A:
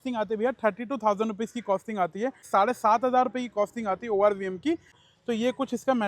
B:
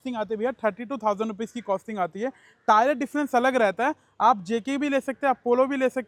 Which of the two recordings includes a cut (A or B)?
A